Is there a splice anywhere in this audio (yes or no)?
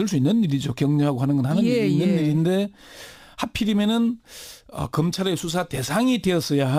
no